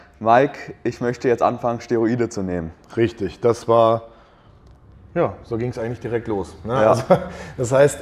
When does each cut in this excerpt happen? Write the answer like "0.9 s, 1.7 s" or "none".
none